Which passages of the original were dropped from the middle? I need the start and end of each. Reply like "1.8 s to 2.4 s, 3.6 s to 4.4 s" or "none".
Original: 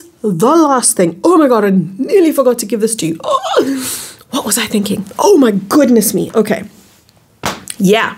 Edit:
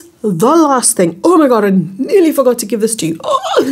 none